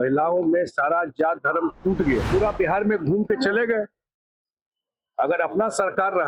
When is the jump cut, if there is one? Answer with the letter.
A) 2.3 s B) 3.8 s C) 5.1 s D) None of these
A